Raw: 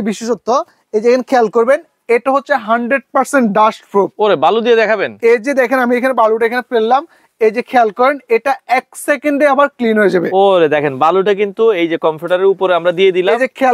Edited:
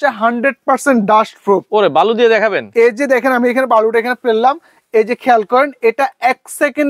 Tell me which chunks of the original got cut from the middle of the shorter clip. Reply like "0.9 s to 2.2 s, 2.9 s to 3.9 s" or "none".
none

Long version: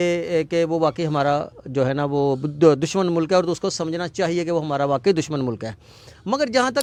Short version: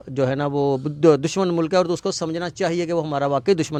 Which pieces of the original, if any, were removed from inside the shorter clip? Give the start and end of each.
none

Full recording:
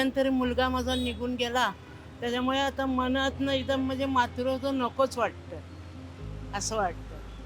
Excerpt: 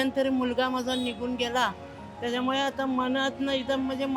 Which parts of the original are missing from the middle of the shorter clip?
none

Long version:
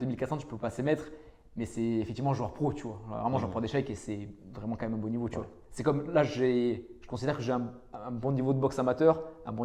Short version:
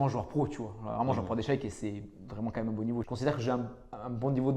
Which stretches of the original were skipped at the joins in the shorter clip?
5.3 s to 7.1 s

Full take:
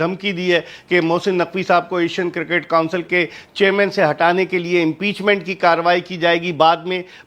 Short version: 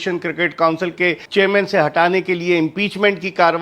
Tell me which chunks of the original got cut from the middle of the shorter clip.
3.3 s to 3.5 s

